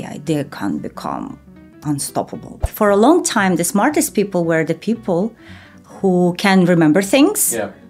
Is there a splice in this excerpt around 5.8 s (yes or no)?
no